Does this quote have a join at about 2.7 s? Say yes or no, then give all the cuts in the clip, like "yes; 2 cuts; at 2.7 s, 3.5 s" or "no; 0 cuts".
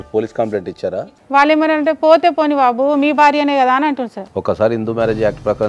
no; 2 cuts; at 1.0 s, 4.2 s